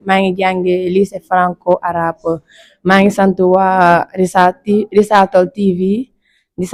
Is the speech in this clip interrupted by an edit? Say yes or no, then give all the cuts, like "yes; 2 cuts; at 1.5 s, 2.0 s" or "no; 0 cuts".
no; 0 cuts